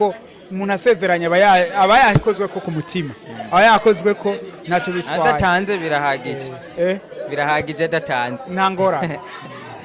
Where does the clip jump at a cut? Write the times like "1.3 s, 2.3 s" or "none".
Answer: none

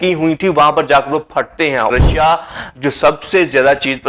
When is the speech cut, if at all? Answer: 1.9 s

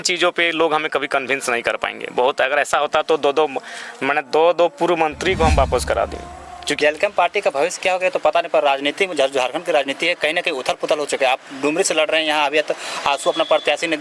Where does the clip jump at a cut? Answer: 6.8 s

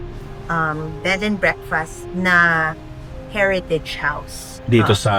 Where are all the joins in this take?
none

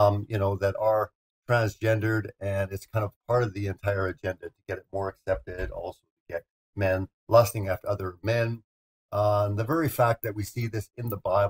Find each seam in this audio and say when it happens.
3.3 s

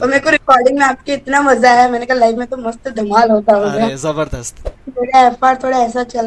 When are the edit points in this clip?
4.5 s

